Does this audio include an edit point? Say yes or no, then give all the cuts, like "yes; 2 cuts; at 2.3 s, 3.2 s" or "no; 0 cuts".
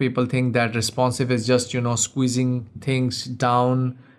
no; 0 cuts